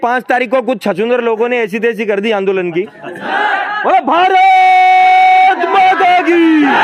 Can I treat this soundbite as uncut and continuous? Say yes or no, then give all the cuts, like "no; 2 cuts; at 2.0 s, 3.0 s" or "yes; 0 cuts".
no; 1 cut; at 3.2 s